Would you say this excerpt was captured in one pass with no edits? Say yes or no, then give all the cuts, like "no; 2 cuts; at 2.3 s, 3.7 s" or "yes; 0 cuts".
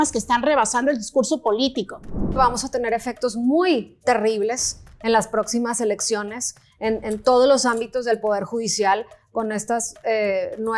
no; 1 cut; at 2.4 s